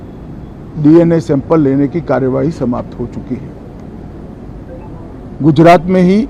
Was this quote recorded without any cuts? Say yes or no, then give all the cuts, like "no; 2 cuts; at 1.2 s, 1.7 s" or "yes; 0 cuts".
yes; 0 cuts